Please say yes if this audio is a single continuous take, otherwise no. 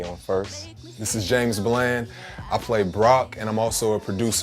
no